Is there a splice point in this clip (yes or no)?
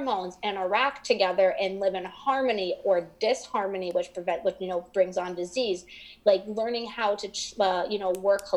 no